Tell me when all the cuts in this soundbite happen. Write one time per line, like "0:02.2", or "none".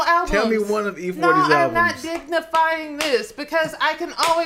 none